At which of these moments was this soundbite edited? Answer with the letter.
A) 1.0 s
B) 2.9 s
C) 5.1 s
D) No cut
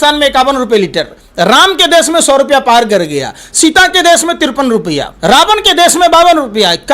C